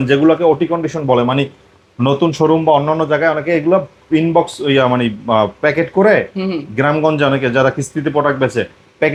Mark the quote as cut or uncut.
uncut